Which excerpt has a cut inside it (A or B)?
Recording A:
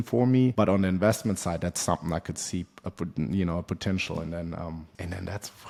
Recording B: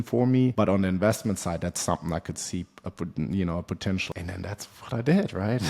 B